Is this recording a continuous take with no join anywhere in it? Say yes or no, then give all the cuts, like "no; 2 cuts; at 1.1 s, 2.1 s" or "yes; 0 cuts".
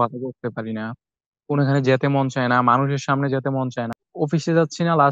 no; 1 cut; at 4.0 s